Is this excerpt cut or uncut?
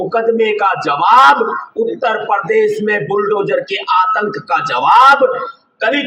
uncut